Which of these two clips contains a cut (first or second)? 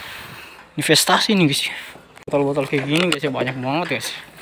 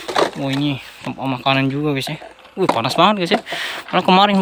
first